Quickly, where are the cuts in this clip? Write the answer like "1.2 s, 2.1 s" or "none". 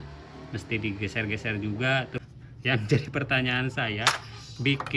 2.2 s

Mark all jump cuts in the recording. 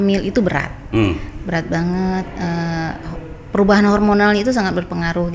none

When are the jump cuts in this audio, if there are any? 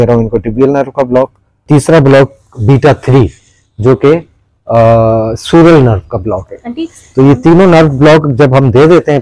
1.6 s

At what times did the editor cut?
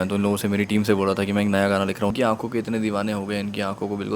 2.1 s

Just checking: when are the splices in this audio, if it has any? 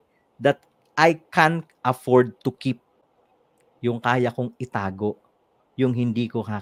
none

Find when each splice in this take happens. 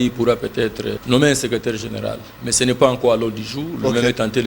1.0 s

